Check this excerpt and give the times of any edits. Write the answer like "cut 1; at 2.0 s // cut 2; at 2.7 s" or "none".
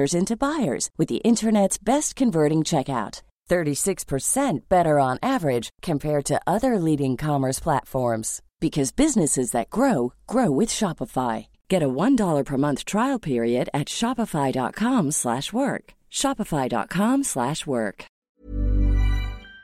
cut 1; at 18.2 s